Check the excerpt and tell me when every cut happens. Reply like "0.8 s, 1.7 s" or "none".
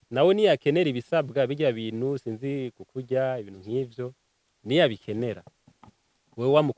none